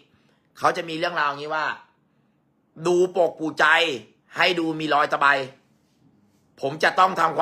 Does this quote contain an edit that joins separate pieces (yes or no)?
no